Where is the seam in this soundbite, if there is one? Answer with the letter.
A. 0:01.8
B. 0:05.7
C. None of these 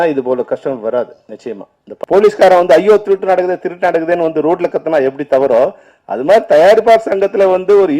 A